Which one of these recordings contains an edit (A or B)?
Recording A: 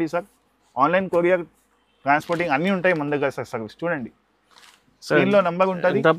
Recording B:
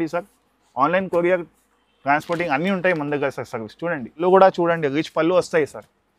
B